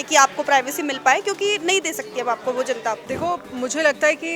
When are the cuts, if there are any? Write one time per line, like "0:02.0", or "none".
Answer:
0:03.1